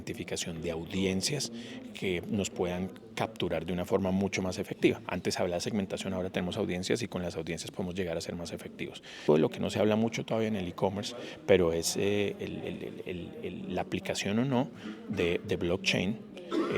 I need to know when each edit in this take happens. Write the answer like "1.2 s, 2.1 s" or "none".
9.3 s